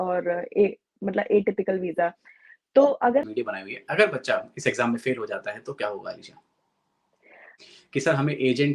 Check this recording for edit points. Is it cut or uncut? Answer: cut